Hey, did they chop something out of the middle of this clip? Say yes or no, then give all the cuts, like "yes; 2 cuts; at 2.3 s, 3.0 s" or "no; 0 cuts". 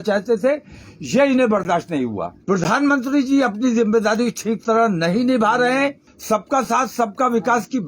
yes; 2 cuts; at 2.3 s, 6.1 s